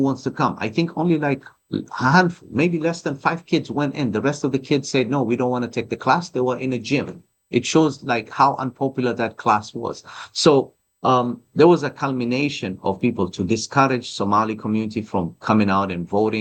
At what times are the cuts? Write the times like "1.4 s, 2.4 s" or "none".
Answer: none